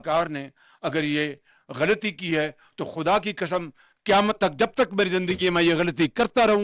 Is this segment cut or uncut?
uncut